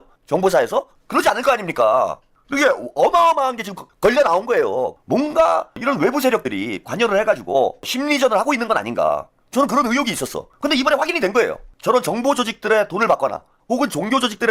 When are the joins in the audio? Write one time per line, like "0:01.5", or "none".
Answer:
0:05.0
0:09.4
0:10.4
0:11.7
0:13.5